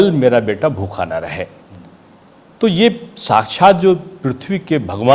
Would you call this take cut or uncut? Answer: uncut